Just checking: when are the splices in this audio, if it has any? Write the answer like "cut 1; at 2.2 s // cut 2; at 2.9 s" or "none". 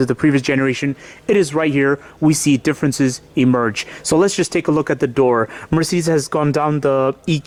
none